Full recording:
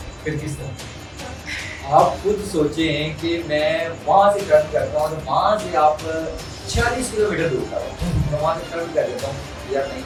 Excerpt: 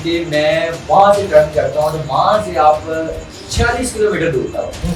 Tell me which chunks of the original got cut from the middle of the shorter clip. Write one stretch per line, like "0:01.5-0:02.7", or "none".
none